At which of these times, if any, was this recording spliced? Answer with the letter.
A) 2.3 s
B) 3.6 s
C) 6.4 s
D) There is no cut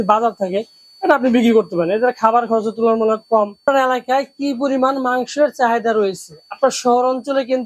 B